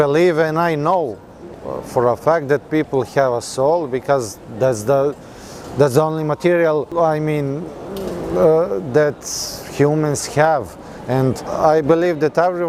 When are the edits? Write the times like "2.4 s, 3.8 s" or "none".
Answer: none